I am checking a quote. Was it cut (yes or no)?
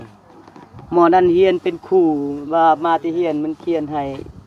no